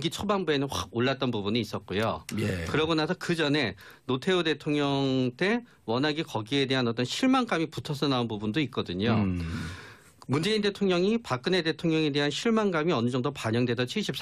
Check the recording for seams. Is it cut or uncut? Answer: uncut